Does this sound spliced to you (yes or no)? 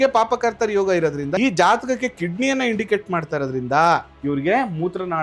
yes